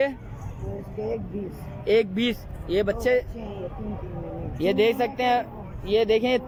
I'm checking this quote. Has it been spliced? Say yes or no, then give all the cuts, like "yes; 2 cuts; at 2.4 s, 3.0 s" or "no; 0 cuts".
no; 0 cuts